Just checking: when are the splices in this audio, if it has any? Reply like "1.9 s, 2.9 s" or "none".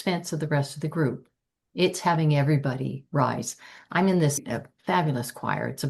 4.5 s